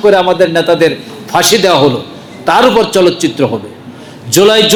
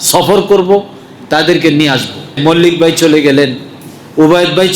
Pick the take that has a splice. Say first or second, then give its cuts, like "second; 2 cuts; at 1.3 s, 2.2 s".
second; 1 cut; at 2.4 s